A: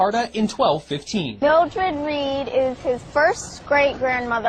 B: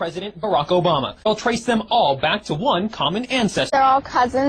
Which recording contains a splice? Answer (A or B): B